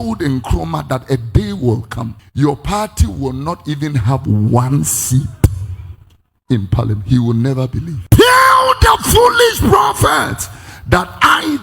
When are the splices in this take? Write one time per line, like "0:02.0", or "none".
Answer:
0:02.2
0:07.9